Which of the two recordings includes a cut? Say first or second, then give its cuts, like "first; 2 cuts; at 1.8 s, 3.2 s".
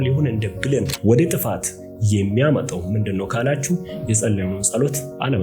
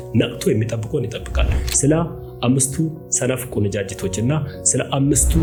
first; 1 cut; at 0.9 s